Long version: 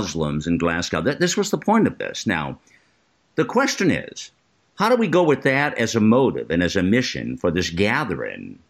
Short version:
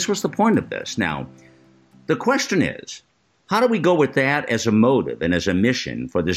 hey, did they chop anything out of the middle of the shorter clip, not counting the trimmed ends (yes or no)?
no